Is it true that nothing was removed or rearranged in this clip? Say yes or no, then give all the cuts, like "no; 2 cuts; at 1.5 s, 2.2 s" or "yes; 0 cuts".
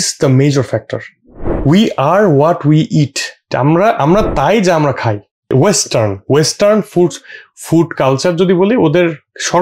no; 2 cuts; at 3.5 s, 5.5 s